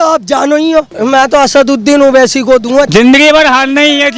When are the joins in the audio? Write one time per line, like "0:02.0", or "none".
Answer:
0:00.9
0:02.9

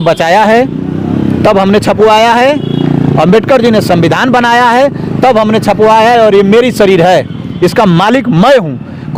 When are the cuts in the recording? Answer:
none

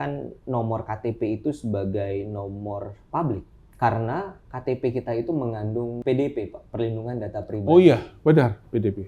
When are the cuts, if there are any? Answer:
0:03.6
0:06.0

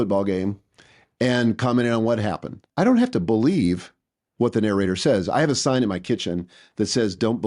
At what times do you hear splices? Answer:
0:02.6

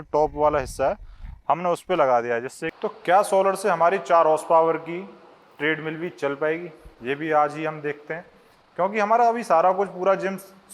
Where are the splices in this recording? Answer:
0:02.6

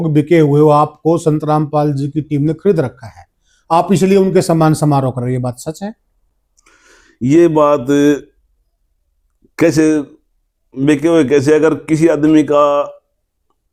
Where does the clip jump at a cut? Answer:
none

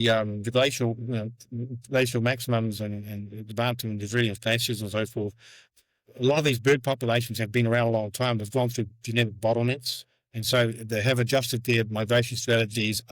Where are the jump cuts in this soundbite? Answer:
0:05.7

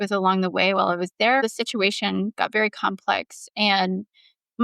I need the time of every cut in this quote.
0:01.4

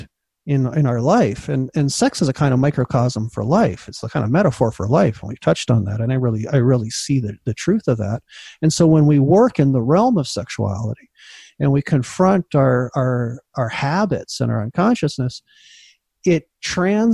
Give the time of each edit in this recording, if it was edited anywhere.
none

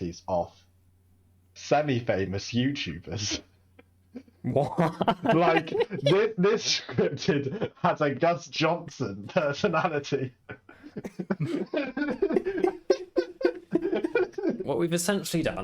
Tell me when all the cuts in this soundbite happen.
0:14.6

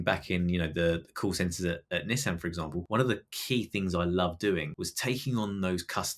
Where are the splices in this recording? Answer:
0:02.8
0:04.8

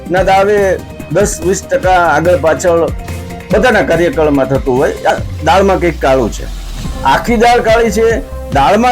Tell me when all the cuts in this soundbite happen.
0:05.1

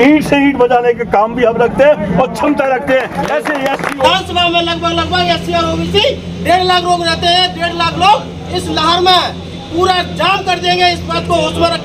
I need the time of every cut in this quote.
0:04.0

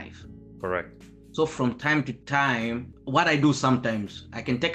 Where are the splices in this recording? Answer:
0:02.9

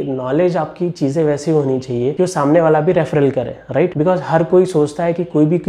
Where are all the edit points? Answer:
none

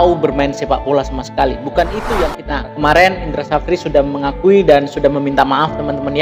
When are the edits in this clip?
0:02.4

